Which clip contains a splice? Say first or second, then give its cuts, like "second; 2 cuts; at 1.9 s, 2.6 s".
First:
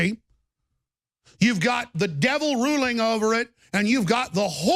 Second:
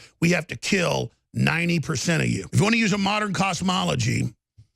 second; 1 cut; at 2.5 s